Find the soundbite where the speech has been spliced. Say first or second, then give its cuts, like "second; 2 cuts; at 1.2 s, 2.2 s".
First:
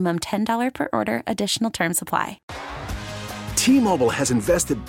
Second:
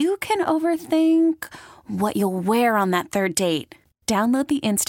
first; 1 cut; at 2.4 s